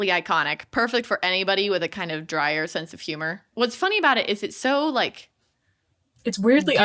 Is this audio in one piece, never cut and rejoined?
no; 1 cut; at 3.5 s

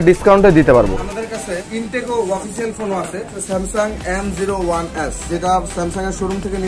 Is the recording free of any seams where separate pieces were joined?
no; 3 cuts; at 0.9 s, 3.4 s, 5.2 s

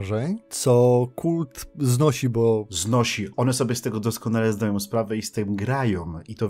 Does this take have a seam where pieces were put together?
yes; 1 cut; at 2.9 s

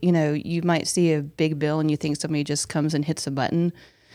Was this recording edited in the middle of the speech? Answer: no; 0 cuts

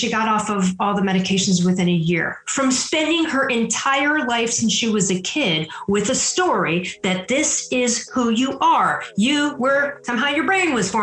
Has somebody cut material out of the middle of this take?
yes; 1 cut; at 10.0 s

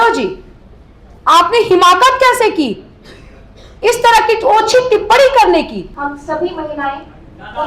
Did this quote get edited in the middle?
yes; 1 cut; at 5.9 s

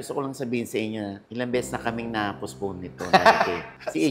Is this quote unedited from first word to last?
yes; 0 cuts

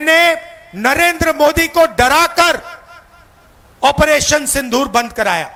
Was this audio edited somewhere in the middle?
no; 0 cuts

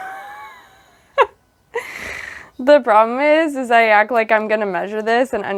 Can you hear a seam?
no; 0 cuts

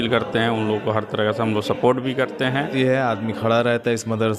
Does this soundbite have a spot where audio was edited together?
yes; 1 cut; at 2.7 s

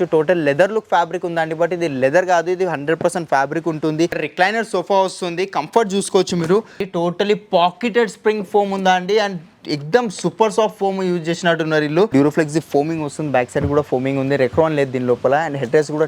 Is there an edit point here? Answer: yes; 3 cuts; at 4.2 s, 6.8 s, 12.1 s

